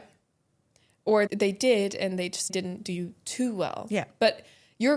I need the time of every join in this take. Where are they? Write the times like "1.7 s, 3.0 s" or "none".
1.3 s, 2.5 s